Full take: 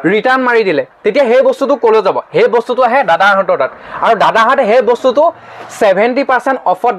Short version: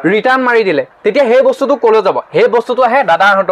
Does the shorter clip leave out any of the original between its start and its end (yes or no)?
no